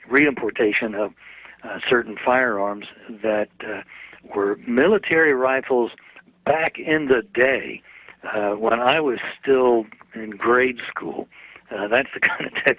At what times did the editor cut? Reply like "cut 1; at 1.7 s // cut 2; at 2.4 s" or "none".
none